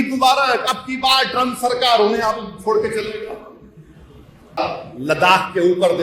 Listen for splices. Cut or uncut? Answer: cut